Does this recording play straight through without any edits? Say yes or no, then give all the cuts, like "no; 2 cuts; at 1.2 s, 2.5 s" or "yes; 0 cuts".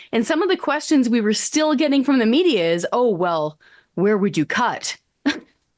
yes; 0 cuts